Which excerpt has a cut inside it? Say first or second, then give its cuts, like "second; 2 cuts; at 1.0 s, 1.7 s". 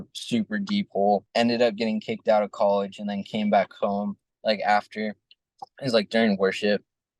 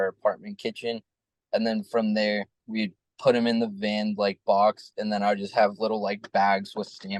first; 1 cut; at 4.2 s